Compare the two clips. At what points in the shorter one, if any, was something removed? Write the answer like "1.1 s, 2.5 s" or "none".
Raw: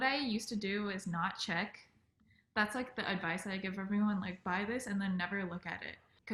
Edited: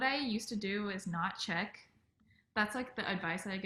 none

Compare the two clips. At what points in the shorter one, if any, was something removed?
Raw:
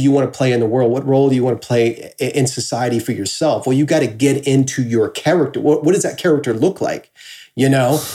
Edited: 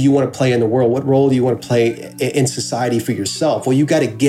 none

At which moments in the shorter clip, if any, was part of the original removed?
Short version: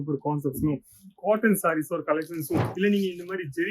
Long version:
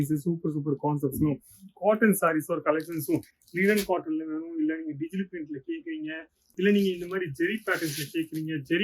2.7 s

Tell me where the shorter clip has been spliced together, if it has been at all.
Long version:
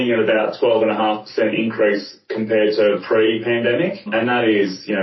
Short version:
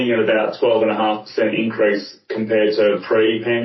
none

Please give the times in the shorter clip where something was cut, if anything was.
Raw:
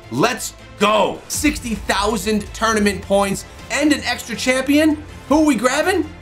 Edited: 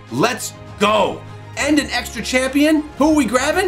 1.3 s, 2.9 s

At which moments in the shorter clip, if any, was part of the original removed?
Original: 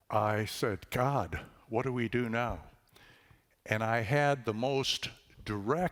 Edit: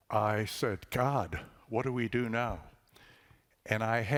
none

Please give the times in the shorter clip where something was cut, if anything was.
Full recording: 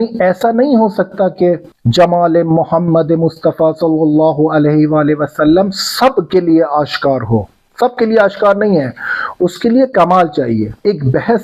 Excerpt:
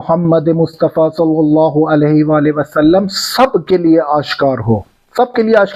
none

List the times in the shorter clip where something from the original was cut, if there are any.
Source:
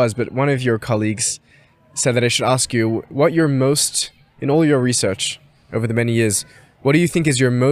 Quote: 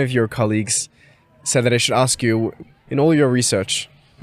2.5 s

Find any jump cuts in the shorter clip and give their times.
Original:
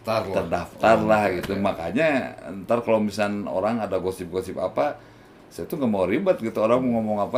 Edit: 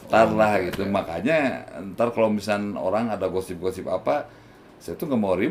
none

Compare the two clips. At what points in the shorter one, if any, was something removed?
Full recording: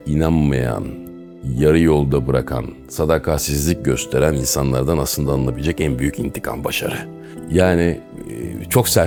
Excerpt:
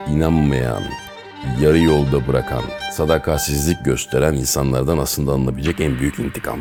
none

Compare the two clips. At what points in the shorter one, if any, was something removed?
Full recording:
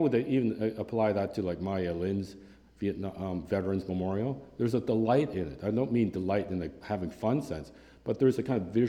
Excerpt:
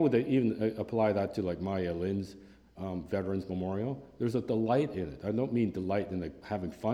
2.7 s

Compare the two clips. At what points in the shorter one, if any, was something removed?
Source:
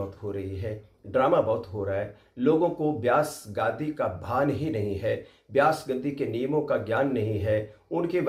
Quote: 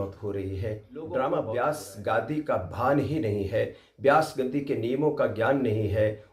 1.5 s

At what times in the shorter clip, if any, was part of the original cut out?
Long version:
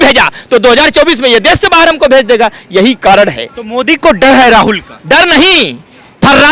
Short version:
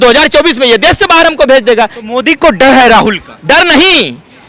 2.0 s

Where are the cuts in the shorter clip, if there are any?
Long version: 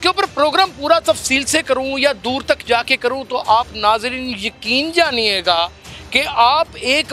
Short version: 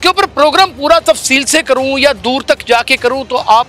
none

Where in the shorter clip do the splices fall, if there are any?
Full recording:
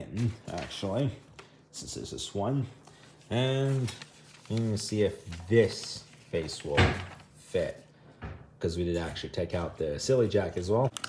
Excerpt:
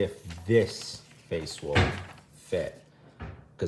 none

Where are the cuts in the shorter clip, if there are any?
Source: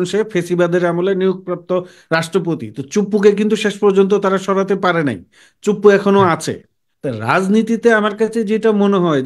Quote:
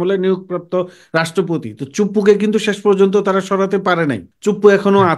4.3 s

